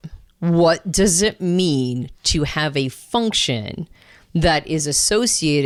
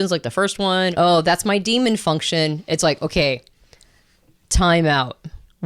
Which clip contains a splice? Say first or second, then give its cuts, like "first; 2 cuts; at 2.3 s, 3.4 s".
second; 1 cut; at 0.9 s